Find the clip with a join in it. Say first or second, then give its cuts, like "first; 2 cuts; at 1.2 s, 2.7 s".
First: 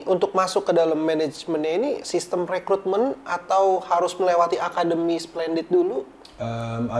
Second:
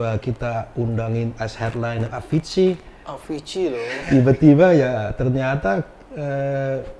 second; 1 cut; at 4.0 s